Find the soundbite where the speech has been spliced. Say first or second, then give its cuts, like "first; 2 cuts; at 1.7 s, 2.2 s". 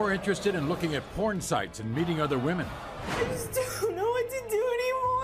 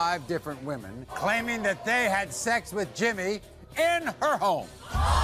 second; 1 cut; at 1.1 s